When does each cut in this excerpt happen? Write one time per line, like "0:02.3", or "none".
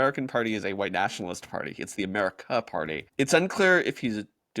0:03.1